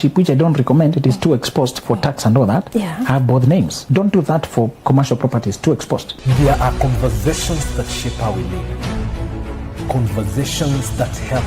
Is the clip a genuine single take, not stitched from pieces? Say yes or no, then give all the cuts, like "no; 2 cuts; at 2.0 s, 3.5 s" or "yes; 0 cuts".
no; 3 cuts; at 3.8 s, 4.8 s, 6.1 s